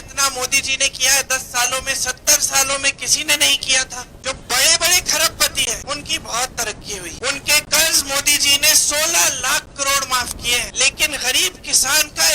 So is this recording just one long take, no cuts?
no; 4 cuts; at 4.1 s, 5.8 s, 7.1 s, 10.7 s

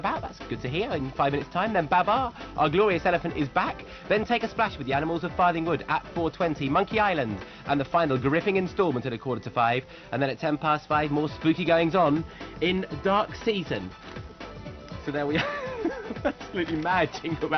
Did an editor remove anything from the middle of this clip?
yes; 1 cut; at 9.1 s

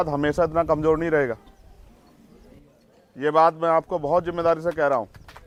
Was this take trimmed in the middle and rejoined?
no; 0 cuts

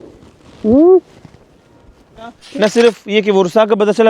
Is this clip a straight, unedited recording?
no; 1 cut; at 2.4 s

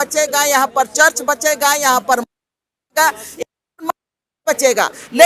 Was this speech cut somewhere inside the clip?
no; 0 cuts

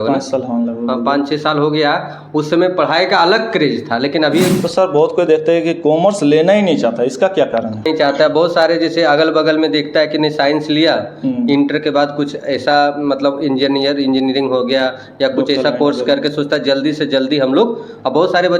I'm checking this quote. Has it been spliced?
yes; 2 cuts; at 4.6 s, 7.9 s

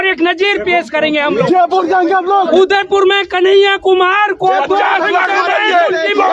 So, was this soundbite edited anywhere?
yes; 1 cut; at 2.5 s

